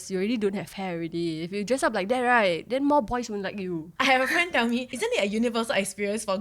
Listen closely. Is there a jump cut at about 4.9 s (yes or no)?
yes